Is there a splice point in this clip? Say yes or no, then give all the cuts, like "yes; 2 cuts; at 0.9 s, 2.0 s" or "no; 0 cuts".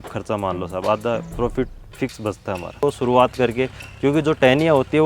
yes; 1 cut; at 2.8 s